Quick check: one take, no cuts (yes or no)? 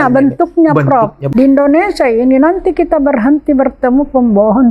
no